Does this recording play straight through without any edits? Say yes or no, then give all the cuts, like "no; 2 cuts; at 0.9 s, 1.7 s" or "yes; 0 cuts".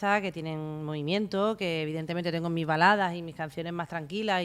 yes; 0 cuts